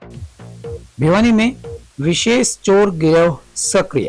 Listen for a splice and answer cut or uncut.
cut